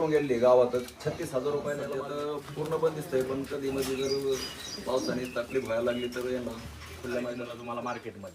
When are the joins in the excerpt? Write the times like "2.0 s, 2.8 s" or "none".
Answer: 1.9 s, 7.5 s